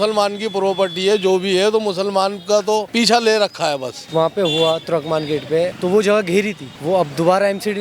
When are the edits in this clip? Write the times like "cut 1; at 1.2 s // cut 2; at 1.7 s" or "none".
cut 1; at 2.9 s // cut 2; at 4.0 s // cut 3; at 5.8 s // cut 4; at 6.7 s